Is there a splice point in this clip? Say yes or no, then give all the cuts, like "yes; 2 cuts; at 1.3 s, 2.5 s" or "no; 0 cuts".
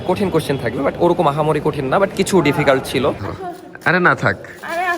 yes; 1 cut; at 3.3 s